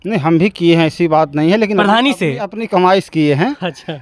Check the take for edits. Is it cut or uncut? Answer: uncut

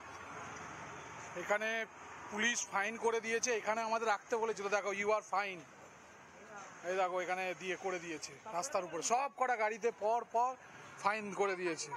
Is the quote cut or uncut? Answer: uncut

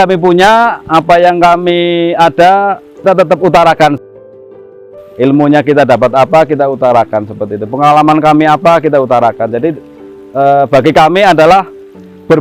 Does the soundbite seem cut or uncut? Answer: cut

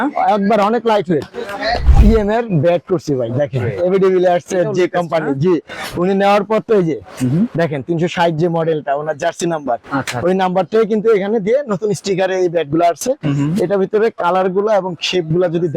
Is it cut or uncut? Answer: cut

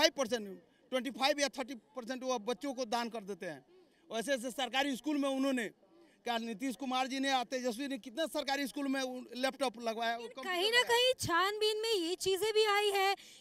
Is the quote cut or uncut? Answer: uncut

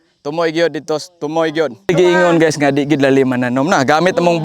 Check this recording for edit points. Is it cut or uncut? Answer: cut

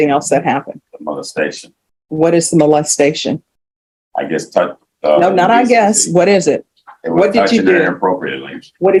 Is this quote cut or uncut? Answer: uncut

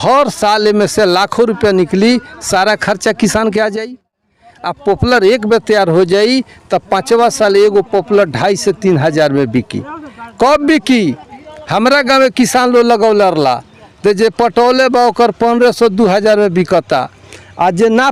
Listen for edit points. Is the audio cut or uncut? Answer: uncut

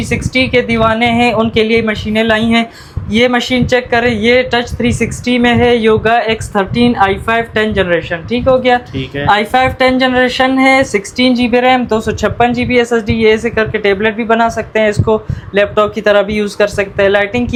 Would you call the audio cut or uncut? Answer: uncut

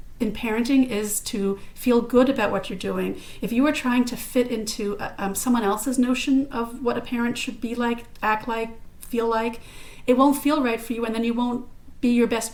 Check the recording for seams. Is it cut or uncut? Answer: uncut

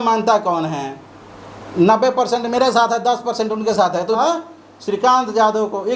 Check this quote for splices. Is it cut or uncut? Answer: cut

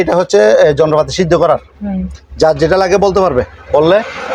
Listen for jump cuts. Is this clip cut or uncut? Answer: uncut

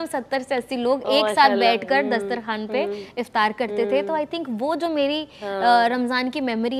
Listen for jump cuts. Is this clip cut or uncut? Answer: uncut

